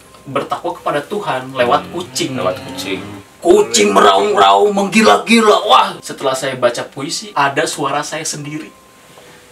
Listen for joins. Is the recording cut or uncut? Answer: cut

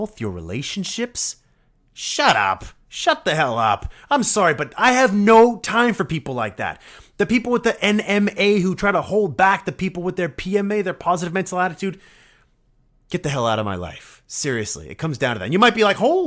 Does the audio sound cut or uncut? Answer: uncut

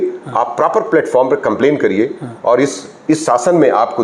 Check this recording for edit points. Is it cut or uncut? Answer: uncut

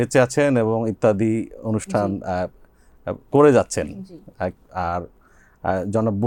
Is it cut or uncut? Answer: uncut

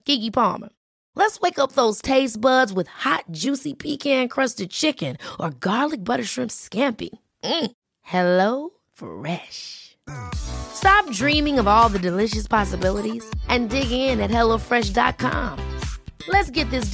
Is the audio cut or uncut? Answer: uncut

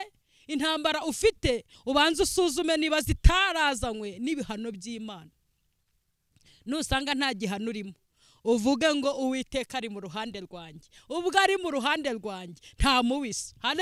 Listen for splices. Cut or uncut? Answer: uncut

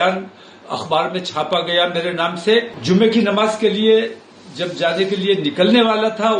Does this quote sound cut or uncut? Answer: cut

